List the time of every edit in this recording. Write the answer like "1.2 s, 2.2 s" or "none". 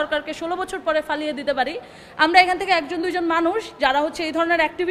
none